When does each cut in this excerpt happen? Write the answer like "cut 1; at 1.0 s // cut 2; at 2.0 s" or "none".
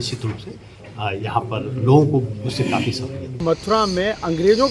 cut 1; at 3.4 s